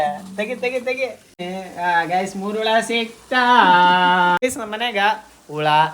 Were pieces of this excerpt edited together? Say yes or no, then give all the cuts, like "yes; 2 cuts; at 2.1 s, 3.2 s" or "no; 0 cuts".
yes; 2 cuts; at 1.4 s, 4.4 s